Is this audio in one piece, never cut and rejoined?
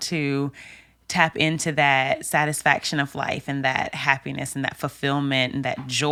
yes; 0 cuts

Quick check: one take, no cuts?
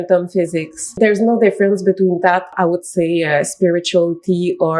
no; 2 cuts; at 0.9 s, 2.5 s

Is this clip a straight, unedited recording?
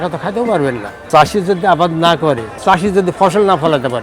no; 2 cuts; at 1.1 s, 2.6 s

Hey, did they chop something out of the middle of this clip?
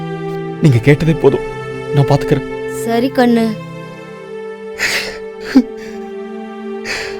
yes; 1 cut; at 4.0 s

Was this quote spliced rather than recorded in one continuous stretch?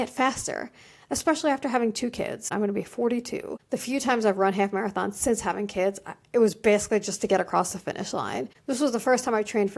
yes; 3 cuts; at 2.5 s, 3.5 s, 8.5 s

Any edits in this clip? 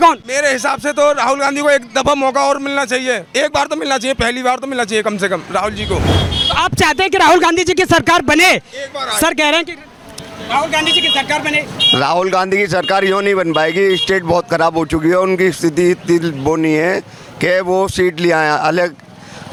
no; 0 cuts

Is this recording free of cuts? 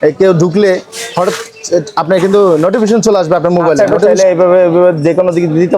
no; 1 cut; at 3.9 s

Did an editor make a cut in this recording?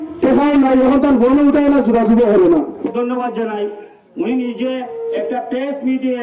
yes; 1 cut; at 2.8 s

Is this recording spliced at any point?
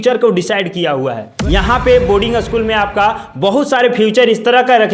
yes; 1 cut; at 1.3 s

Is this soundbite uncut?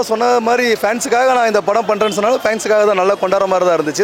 yes; 0 cuts

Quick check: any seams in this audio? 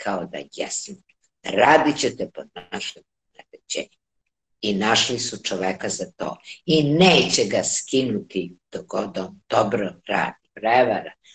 yes; 1 cut; at 10.4 s

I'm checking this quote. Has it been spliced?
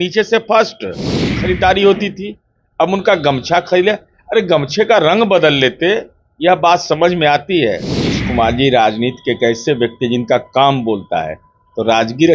yes; 2 cuts; at 1.3 s, 8.2 s

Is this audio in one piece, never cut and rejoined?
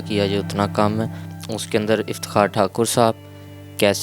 no; 1 cut; at 1.3 s

